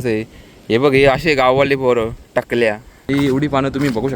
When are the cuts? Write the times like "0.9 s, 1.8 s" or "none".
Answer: 2.9 s